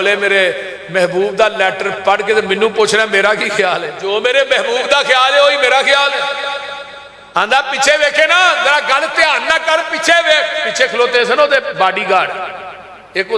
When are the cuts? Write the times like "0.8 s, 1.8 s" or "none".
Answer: 3.9 s